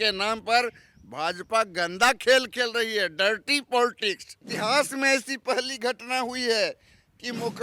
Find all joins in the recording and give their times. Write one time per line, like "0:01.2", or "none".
0:04.4